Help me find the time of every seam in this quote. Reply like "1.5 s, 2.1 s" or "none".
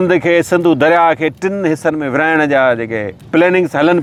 none